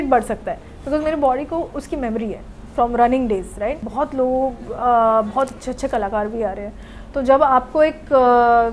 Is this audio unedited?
no; 1 cut; at 3.8 s

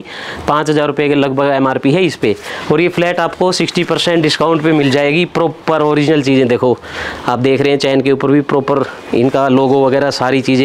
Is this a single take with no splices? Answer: yes; 0 cuts

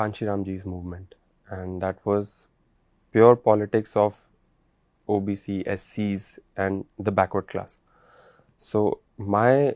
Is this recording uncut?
yes; 0 cuts

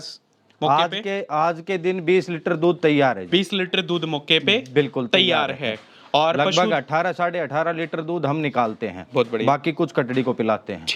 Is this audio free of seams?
yes; 0 cuts

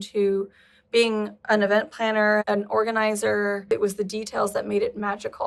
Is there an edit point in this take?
yes; 1 cut; at 3.7 s

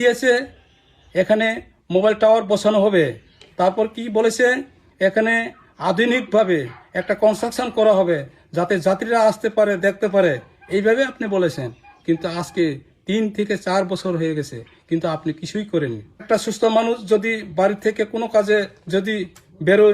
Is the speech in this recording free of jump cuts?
no; 1 cut; at 16.2 s

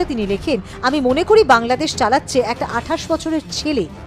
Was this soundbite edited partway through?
no; 0 cuts

